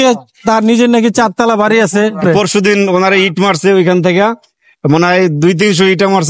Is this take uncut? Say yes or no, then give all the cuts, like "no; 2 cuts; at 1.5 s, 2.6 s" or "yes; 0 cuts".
no; 1 cut; at 2.2 s